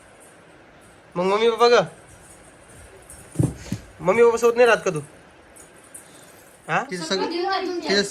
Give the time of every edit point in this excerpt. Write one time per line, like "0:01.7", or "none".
0:06.9